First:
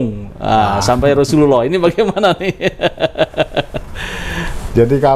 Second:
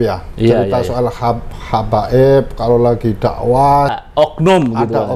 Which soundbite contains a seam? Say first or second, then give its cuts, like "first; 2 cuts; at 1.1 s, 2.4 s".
second; 1 cut; at 3.9 s